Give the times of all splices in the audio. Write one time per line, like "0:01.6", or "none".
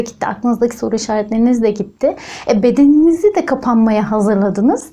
none